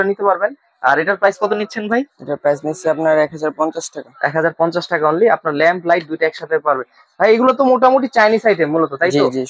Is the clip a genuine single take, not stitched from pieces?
yes; 0 cuts

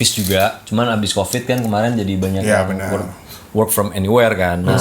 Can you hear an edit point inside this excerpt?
no; 0 cuts

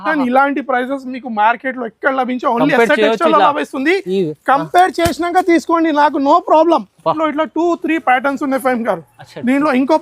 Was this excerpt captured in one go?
no; 1 cut; at 7.2 s

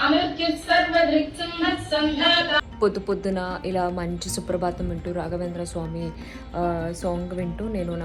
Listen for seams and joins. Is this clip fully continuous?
no; 1 cut; at 2.7 s

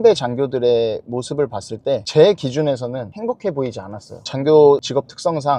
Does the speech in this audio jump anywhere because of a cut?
no; 0 cuts

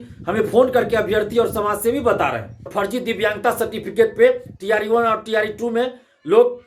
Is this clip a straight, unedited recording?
no; 1 cut; at 2.7 s

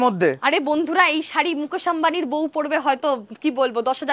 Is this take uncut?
yes; 0 cuts

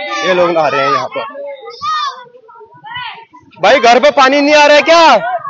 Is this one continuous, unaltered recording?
yes; 0 cuts

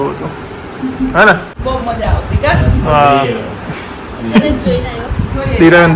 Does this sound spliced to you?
yes; 1 cut; at 1.5 s

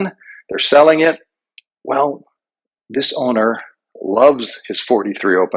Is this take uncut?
yes; 0 cuts

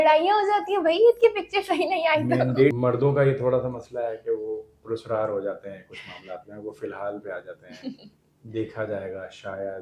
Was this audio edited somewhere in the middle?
yes; 1 cut; at 2.8 s

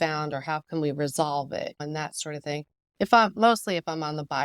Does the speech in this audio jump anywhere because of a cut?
yes; 2 cuts; at 1.8 s, 3.3 s

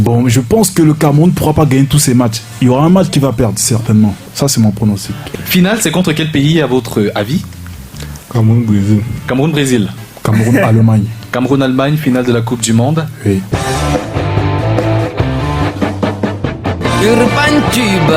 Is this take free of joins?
no; 4 cuts; at 4.3 s, 5.2 s, 10.0 s, 13.5 s

